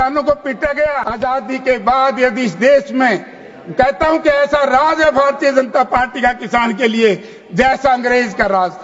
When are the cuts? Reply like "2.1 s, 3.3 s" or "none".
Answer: 1.0 s